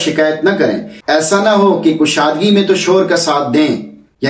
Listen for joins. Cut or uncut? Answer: uncut